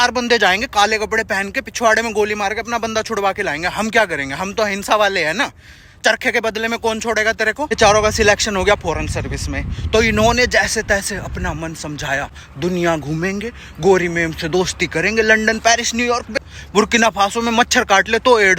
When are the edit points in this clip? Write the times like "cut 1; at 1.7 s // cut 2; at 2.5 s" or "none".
cut 1; at 7.7 s // cut 2; at 12.4 s // cut 3; at 16.3 s